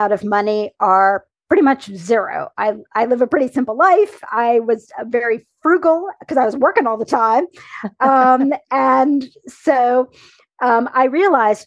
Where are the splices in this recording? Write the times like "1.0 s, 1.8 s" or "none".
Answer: none